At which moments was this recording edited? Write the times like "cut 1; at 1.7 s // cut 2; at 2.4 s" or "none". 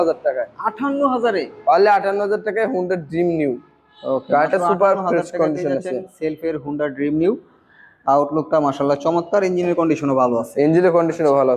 none